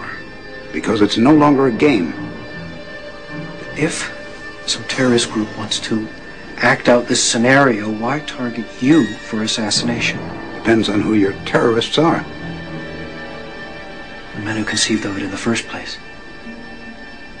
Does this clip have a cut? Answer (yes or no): no